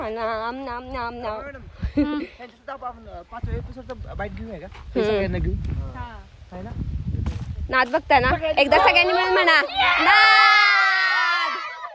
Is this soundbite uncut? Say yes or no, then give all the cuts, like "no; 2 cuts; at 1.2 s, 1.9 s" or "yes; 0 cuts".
yes; 0 cuts